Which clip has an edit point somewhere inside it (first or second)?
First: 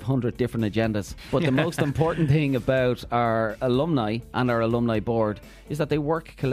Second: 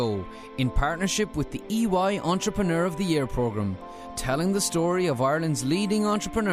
first